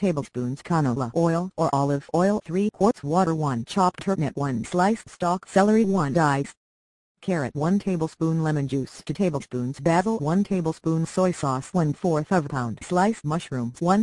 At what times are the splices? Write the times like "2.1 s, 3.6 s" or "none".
10.8 s